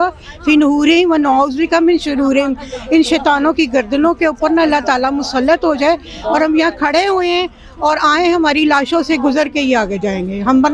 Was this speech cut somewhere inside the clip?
no; 0 cuts

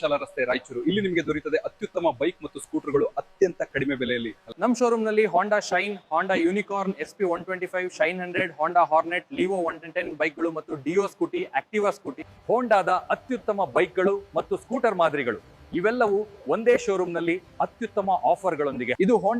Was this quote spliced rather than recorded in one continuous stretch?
no; 0 cuts

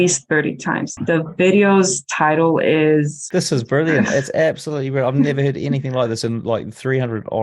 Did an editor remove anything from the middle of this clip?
yes; 2 cuts; at 0.9 s, 3.2 s

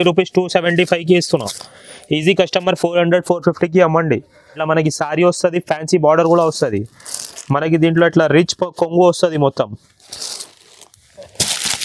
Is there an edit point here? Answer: yes; 1 cut; at 4.6 s

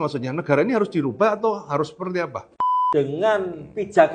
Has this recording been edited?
yes; 1 cut; at 2.5 s

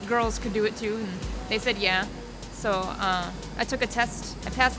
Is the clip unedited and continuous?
yes; 0 cuts

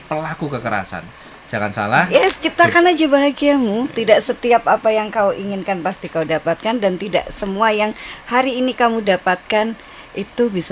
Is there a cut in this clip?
yes; 1 cut; at 2.1 s

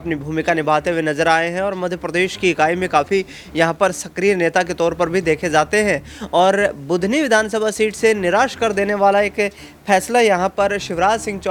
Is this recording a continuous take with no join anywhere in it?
yes; 0 cuts

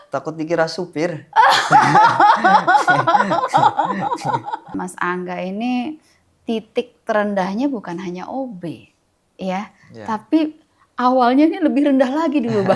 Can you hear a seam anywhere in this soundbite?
yes; 1 cut; at 4.7 s

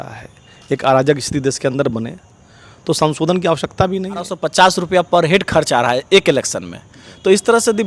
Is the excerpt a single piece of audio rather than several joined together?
no; 1 cut; at 4.4 s

